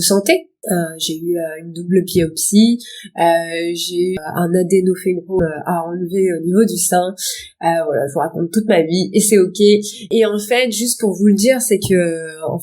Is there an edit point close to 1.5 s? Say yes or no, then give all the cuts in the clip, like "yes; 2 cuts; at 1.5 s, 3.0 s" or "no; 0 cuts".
no; 2 cuts; at 4.1 s, 5.4 s